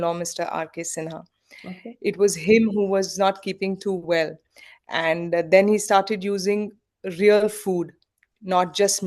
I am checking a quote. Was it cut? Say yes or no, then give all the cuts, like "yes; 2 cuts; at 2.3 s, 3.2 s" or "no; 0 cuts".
no; 0 cuts